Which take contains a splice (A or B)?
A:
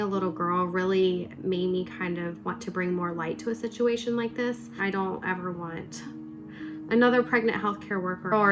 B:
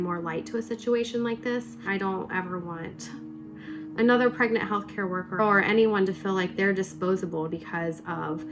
B